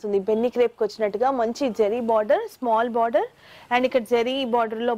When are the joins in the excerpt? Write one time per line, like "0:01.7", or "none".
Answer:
none

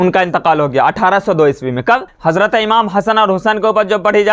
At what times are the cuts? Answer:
0:02.1

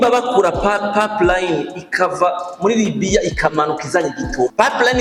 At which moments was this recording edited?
none

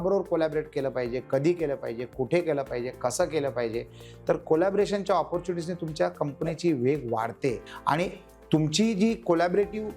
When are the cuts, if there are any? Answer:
0:07.7

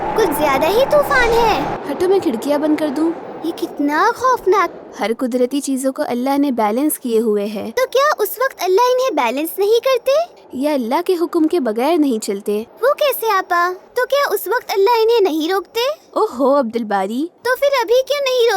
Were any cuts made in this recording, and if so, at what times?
0:01.8
0:04.8
0:07.6
0:12.7
0:13.8
0:17.4

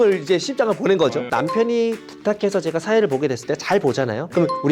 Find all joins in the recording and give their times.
0:01.3

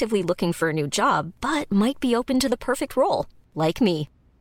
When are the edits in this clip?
none

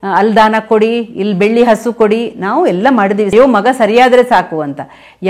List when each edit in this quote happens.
0:03.3

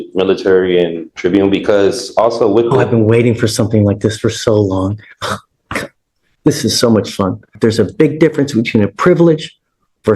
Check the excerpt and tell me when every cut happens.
0:01.1
0:07.5

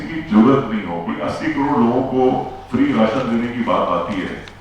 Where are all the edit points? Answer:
0:01.0

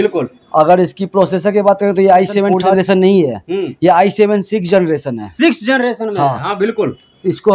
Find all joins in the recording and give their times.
0:02.6

